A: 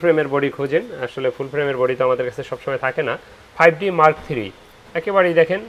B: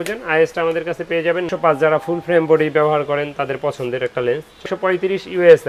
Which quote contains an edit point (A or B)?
B